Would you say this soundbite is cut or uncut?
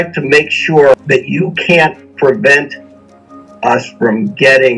cut